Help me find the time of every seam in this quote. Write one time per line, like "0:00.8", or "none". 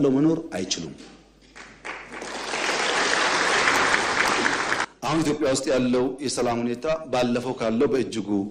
0:04.8